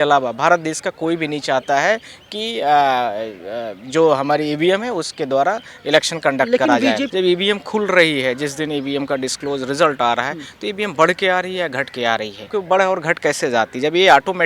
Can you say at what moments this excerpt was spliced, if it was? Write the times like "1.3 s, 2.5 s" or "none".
7.0 s, 12.5 s